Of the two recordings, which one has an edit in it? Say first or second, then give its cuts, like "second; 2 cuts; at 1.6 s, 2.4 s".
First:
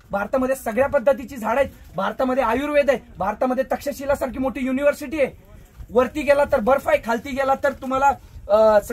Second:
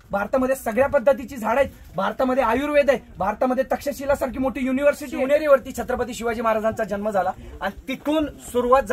second; 1 cut; at 5.1 s